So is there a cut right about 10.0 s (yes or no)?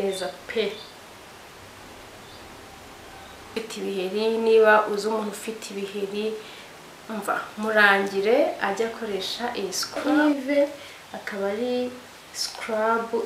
yes